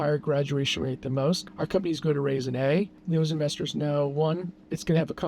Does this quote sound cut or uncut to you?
cut